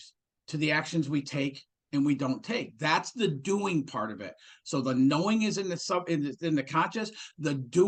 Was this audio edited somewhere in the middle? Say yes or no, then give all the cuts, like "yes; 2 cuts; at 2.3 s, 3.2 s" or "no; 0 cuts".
no; 0 cuts